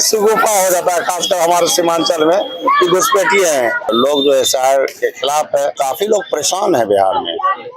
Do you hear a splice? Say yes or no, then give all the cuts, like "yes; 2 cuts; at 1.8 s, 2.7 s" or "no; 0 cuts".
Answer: yes; 2 cuts; at 3.9 s, 5.8 s